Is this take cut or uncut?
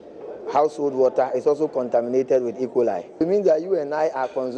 cut